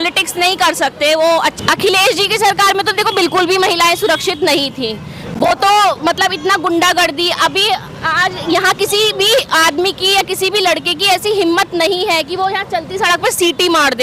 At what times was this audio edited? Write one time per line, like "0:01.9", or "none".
0:01.6